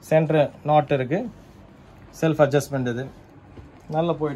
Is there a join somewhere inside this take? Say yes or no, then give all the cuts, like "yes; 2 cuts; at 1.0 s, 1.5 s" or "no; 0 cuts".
no; 0 cuts